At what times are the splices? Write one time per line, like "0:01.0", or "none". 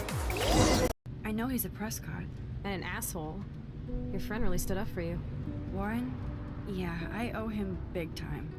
0:01.1